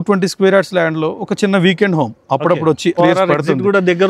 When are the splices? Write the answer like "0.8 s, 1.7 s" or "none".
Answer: 3.0 s